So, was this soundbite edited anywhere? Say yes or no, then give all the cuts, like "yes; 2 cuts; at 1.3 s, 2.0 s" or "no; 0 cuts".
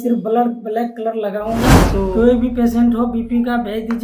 yes; 1 cut; at 1.8 s